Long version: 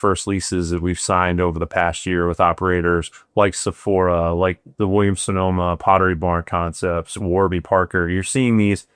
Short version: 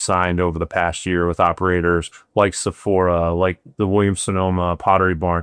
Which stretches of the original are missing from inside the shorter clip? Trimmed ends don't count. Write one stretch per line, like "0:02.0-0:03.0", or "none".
none